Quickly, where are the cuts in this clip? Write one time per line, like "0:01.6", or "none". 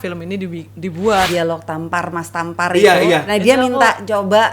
0:01.3